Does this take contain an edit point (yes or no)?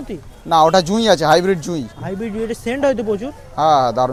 no